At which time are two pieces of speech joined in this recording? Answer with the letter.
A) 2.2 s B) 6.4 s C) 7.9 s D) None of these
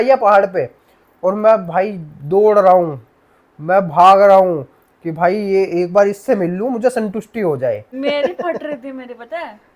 C